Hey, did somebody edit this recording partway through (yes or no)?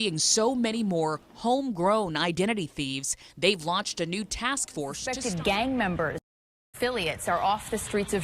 yes